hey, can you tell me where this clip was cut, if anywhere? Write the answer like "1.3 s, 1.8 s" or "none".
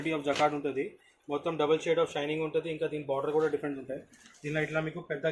none